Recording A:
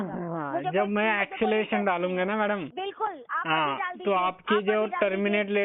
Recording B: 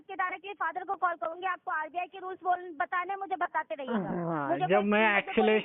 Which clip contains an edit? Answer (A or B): A